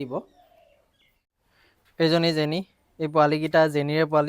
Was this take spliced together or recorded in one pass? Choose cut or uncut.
cut